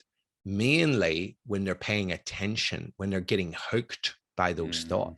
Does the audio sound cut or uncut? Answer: uncut